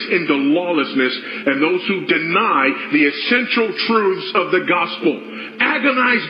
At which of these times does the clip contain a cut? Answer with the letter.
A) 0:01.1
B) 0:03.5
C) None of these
C